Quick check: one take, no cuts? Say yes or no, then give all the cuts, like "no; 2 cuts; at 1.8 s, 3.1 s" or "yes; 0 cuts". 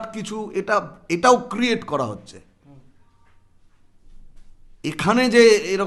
yes; 0 cuts